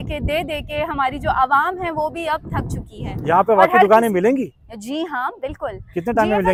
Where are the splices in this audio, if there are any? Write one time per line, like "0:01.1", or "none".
none